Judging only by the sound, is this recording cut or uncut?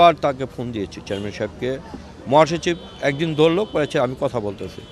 uncut